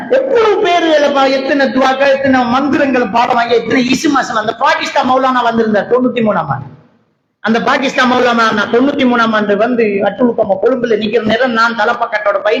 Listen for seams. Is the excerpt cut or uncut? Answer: uncut